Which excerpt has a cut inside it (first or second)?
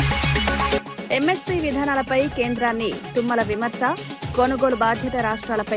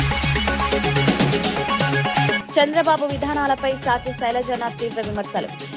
second